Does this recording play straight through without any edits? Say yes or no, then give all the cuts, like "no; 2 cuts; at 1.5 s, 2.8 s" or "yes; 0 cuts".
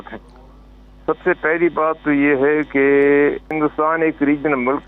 no; 1 cut; at 3.5 s